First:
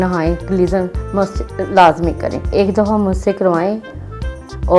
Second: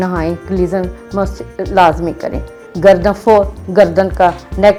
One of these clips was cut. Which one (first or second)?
first